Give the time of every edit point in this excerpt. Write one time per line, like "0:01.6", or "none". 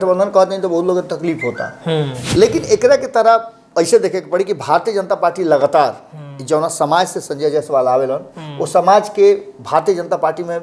0:02.2